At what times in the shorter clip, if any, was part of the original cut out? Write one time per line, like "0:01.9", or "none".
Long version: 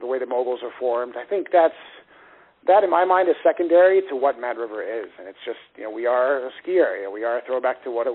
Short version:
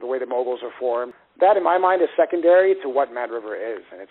0:01.2